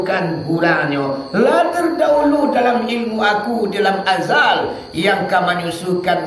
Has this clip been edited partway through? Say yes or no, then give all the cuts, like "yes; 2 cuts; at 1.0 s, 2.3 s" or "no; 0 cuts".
no; 0 cuts